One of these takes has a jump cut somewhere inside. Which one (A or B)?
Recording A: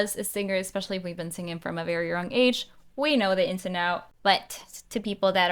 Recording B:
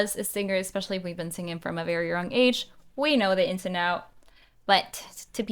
A